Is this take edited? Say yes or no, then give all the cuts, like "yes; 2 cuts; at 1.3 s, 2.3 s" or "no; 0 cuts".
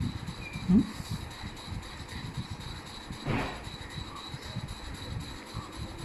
no; 0 cuts